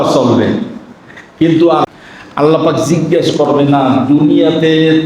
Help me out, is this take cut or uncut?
cut